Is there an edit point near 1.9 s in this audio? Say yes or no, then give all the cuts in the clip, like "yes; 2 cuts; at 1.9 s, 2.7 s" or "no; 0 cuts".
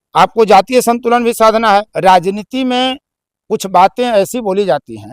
yes; 1 cut; at 1.9 s